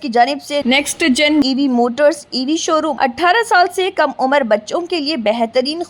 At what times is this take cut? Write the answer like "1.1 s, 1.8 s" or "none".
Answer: 2.9 s